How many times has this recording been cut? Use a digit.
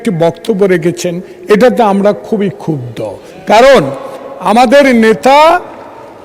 0